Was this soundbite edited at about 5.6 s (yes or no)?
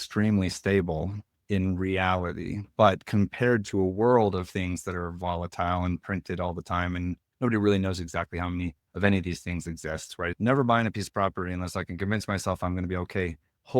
no